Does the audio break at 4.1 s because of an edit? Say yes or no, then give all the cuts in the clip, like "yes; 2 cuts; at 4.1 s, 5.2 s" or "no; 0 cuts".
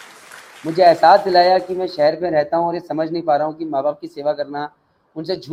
no; 0 cuts